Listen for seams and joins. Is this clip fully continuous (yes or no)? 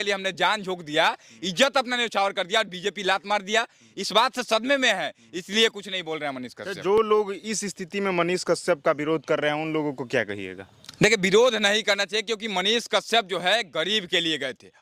yes